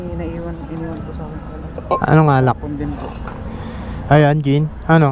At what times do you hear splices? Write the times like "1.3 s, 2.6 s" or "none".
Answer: none

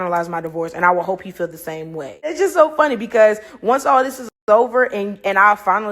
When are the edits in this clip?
2.3 s

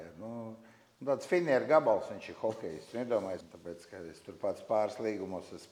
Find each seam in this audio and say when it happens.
3.5 s

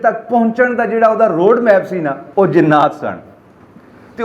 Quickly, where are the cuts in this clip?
2.2 s

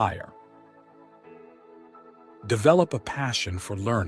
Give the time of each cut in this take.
0.9 s, 1.9 s

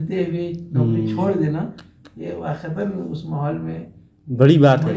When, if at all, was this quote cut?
none

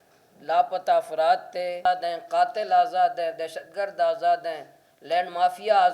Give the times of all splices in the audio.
1.9 s

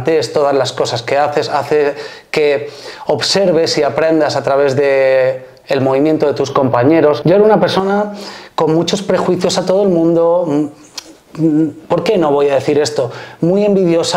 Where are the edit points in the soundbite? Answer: 7.2 s

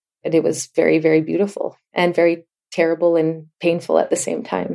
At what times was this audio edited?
none

